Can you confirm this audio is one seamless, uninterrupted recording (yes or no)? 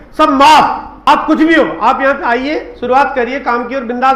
no